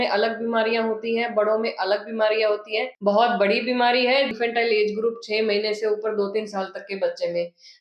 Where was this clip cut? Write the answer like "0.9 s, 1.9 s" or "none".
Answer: 2.9 s, 4.3 s